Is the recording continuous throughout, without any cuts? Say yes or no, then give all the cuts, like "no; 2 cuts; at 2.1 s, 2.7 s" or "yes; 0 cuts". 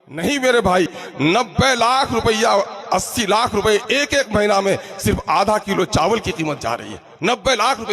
no; 1 cut; at 1.0 s